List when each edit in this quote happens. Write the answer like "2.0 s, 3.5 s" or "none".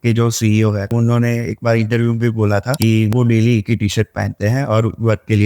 0.9 s, 3.1 s